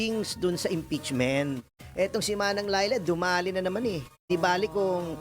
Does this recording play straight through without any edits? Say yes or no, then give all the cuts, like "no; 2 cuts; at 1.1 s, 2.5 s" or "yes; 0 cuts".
no; 2 cuts; at 1.8 s, 4.3 s